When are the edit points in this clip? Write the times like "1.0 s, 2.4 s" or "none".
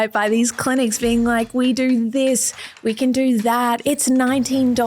3.8 s